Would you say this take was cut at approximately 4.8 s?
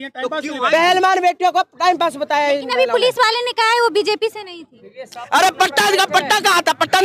no; 0 cuts

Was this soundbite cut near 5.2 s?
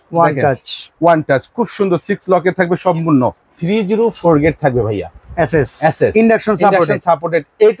no; 1 cut; at 3.4 s

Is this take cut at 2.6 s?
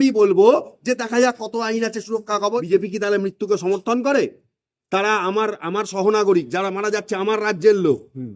yes; 1 cut; at 2.6 s

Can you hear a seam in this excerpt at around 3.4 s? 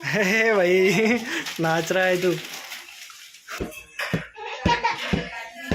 yes; 1 cut; at 3.4 s

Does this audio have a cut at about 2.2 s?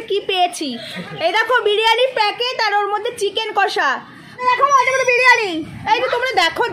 no; 1 cut; at 4.4 s

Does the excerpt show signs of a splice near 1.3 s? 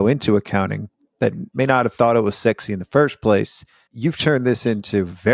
yes; 1 cut; at 1.3 s

